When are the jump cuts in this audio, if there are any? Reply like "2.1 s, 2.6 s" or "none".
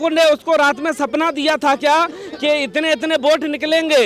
none